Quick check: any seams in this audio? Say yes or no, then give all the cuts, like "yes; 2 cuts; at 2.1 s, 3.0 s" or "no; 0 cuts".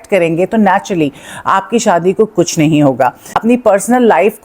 yes; 1 cut; at 3.3 s